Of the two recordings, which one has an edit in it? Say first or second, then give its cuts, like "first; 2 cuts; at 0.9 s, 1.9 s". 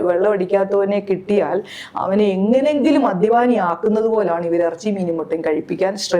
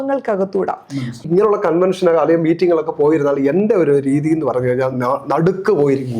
second; 1 cut; at 1.2 s